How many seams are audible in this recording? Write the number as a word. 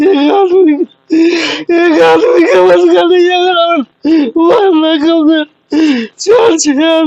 two